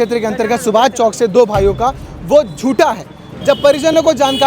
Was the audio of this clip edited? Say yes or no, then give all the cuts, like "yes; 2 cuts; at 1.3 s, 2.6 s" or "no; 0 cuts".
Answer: yes; 1 cut; at 3.2 s